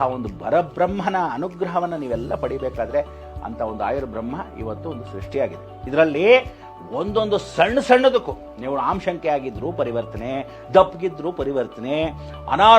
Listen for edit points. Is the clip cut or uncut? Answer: cut